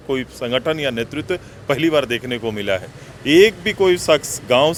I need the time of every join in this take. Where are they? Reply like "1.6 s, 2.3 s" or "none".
none